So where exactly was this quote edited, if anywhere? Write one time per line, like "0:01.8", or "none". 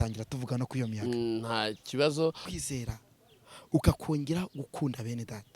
0:02.5